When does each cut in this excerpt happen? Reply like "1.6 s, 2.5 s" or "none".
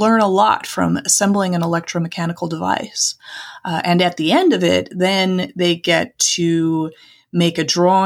none